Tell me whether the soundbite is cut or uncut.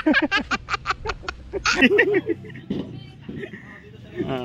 uncut